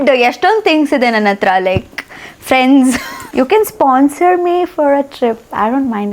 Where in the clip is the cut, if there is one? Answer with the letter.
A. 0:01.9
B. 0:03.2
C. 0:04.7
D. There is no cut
B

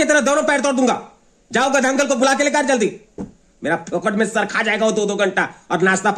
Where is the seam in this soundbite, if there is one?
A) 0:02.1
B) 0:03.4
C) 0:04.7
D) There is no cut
D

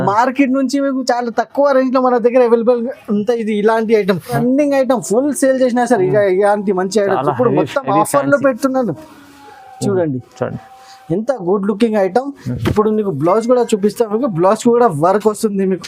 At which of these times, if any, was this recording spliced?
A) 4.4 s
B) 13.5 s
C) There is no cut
A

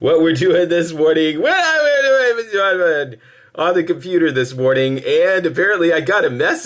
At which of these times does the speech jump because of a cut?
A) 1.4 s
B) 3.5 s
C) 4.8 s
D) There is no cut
A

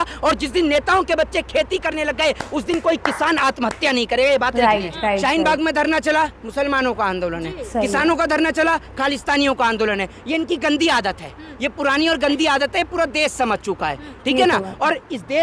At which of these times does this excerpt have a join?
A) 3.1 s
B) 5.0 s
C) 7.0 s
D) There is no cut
B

